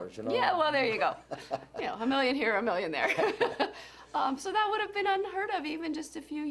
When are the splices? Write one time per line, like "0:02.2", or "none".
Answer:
none